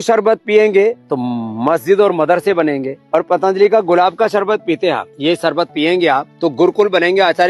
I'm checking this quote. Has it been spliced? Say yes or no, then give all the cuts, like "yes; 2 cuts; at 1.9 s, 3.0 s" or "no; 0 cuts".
yes; 4 cuts; at 1.1 s, 2.9 s, 5.1 s, 6.3 s